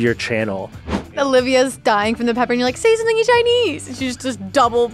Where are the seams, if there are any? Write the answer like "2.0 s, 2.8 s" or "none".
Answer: 1.0 s